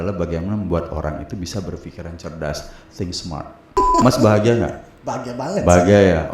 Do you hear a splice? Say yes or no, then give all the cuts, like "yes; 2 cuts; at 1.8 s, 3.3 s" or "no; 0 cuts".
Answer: yes; 1 cut; at 3.7 s